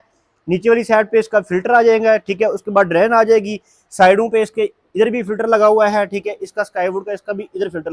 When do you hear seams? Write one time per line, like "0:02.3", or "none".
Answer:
none

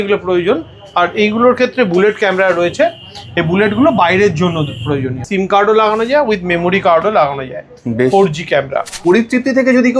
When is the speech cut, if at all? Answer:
0:05.2
0:08.9

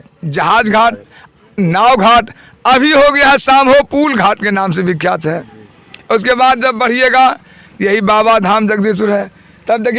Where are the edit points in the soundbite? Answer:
none

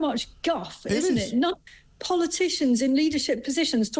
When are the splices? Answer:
0:01.7

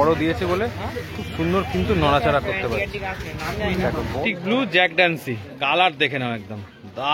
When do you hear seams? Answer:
0:04.2

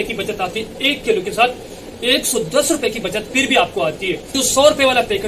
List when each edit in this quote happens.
0:04.3

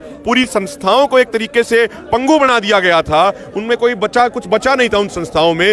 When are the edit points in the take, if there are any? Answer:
none

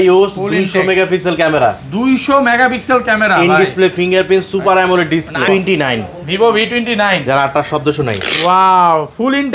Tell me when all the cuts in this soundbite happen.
0:05.4

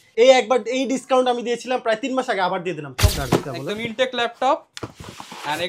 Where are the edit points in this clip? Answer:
0:03.1

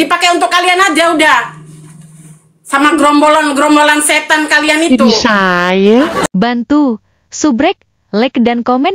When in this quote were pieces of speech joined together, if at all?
0:06.3

